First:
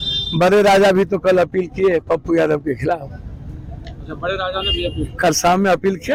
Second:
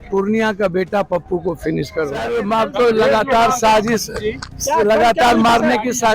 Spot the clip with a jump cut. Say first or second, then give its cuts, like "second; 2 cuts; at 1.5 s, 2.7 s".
second; 1 cut; at 2.4 s